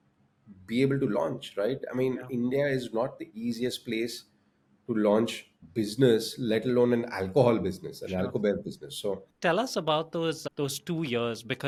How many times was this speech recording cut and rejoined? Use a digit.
0